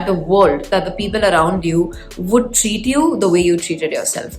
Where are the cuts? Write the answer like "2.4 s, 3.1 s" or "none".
none